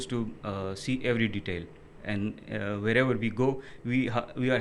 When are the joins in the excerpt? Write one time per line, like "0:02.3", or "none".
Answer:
none